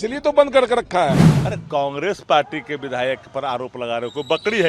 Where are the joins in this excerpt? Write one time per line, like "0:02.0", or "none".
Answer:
0:01.3